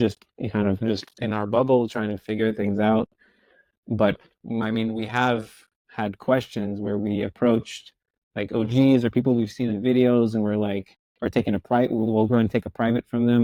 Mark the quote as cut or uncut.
uncut